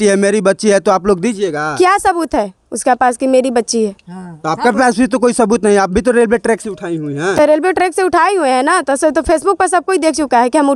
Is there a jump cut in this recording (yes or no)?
no